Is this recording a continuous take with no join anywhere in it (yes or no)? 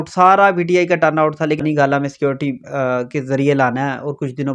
no